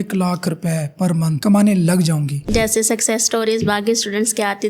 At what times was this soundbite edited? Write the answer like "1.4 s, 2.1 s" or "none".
1.4 s, 2.4 s